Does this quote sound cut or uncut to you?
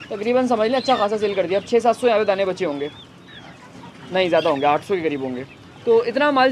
uncut